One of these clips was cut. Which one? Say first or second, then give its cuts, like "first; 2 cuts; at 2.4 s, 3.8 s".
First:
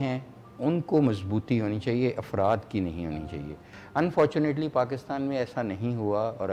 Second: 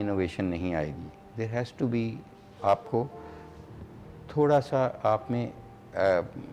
first; 1 cut; at 3.8 s